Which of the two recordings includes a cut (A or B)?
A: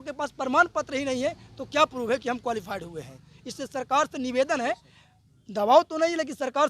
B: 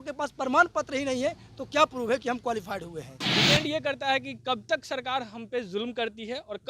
B